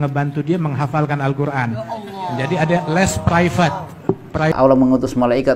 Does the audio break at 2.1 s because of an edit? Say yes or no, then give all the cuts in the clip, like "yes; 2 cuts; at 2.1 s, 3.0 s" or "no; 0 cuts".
no; 1 cut; at 4.5 s